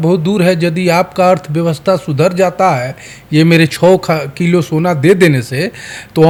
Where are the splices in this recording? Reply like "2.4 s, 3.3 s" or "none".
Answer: none